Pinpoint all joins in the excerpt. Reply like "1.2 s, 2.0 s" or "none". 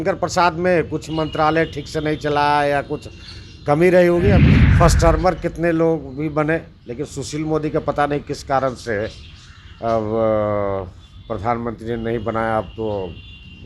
4.5 s

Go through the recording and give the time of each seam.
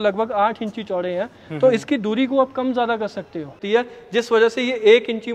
3.6 s

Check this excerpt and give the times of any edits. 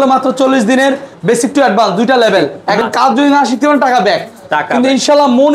2.6 s

